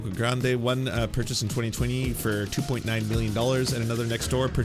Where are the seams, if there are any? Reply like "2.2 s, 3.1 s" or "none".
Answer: none